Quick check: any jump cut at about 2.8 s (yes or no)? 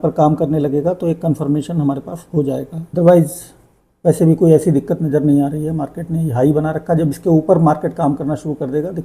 yes